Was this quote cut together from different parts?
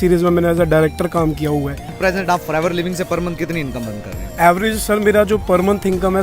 yes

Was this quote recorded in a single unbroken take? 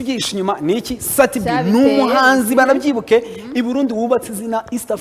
yes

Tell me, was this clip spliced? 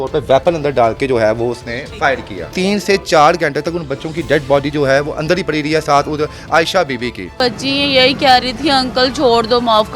yes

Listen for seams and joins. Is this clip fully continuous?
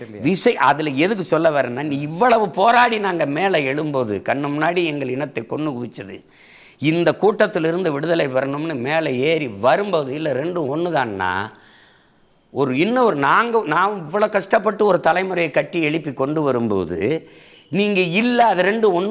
yes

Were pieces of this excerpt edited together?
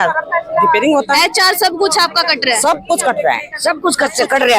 no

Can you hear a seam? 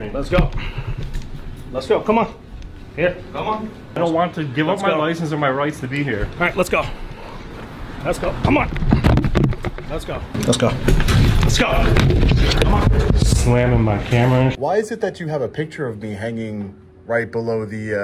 yes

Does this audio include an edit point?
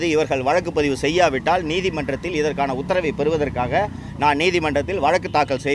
no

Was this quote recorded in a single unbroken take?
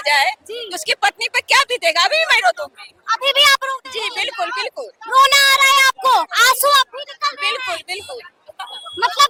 yes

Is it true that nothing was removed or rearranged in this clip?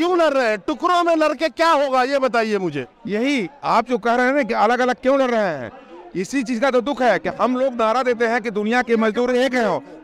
yes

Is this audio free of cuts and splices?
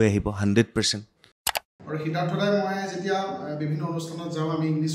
no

